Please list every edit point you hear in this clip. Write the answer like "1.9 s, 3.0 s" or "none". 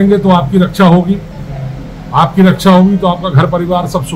none